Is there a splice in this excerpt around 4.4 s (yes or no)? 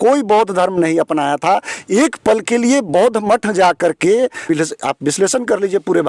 yes